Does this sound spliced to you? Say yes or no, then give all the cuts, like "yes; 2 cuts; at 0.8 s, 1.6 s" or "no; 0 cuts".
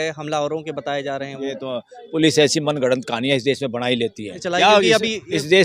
yes; 1 cut; at 4.4 s